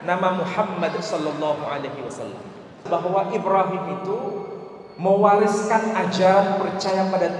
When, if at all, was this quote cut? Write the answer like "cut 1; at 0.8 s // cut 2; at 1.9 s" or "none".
cut 1; at 2.8 s

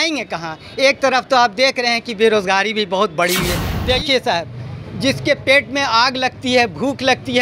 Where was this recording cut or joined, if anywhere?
cut 1; at 3.7 s

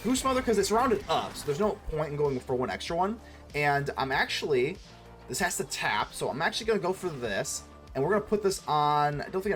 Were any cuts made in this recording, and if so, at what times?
none

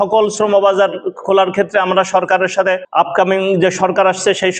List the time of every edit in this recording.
cut 1; at 2.8 s

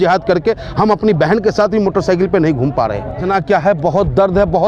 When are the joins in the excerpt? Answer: cut 1; at 3.2 s

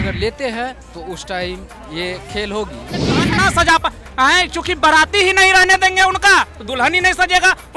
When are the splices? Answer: cut 1; at 3.3 s

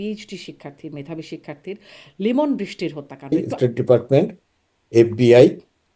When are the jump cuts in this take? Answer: cut 1; at 3.3 s

